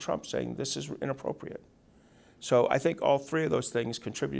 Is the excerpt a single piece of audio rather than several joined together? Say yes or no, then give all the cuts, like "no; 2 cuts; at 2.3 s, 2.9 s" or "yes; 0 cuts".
yes; 0 cuts